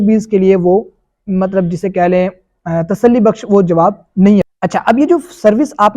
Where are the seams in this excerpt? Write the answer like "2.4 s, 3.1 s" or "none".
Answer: 4.5 s

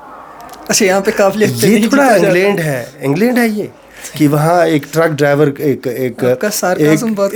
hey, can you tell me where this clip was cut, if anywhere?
none

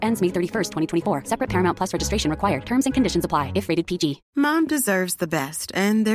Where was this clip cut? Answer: 4.2 s

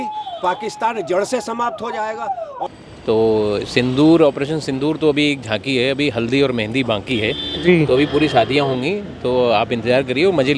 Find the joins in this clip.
2.6 s

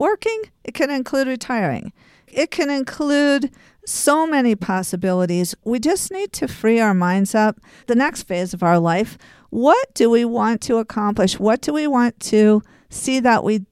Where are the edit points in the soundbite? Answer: 2.3 s, 5.6 s, 7.8 s

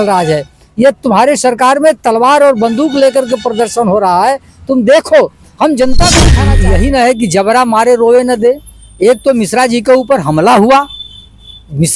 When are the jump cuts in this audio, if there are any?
6.4 s

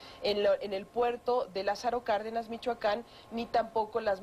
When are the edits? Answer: 1.2 s

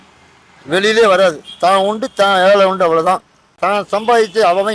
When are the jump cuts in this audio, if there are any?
3.5 s

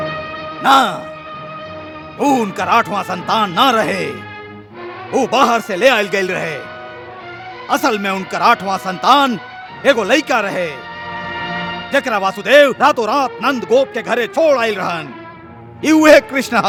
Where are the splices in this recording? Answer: none

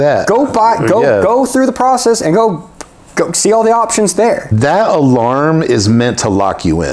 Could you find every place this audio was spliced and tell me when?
4.5 s

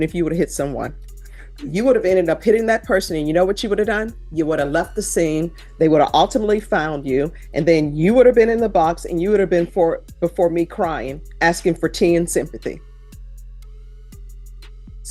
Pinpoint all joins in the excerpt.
none

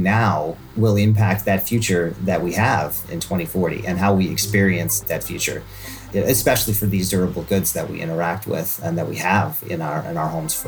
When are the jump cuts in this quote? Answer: none

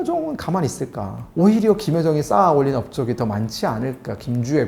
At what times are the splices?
1.3 s

